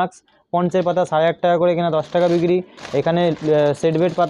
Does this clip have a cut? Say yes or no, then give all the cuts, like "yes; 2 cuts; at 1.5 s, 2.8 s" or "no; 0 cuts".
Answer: no; 0 cuts